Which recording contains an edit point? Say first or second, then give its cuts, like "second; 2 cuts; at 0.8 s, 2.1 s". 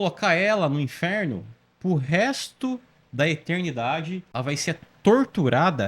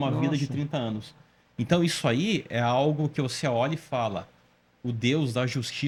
first; 1 cut; at 4.2 s